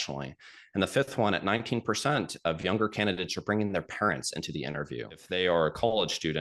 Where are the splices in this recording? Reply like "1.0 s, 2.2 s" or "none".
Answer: 5.2 s